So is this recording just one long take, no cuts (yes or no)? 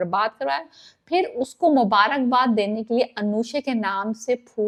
yes